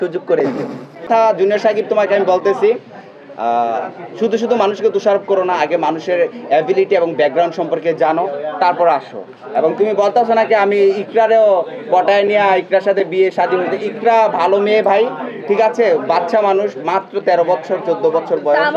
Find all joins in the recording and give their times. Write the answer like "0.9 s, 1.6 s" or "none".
1.1 s